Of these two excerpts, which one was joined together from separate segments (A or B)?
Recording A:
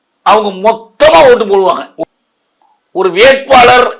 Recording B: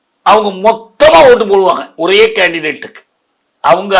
A